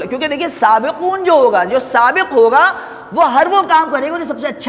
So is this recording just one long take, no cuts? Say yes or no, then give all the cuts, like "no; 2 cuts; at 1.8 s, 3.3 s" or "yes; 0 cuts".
yes; 0 cuts